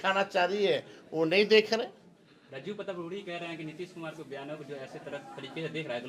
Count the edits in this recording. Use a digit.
0